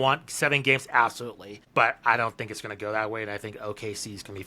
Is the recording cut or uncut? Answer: cut